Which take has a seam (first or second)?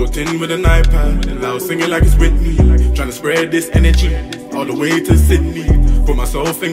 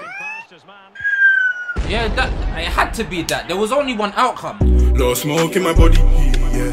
second